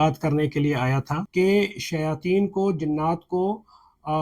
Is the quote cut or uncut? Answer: cut